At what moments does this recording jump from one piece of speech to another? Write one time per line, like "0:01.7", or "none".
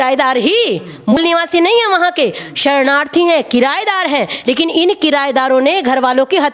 0:01.2